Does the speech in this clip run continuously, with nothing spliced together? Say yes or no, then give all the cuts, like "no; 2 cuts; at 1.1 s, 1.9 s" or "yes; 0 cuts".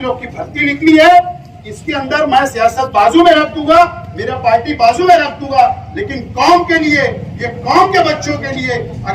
yes; 0 cuts